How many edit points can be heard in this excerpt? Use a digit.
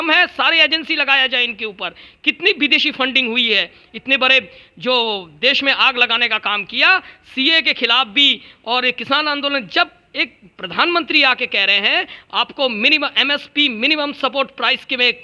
0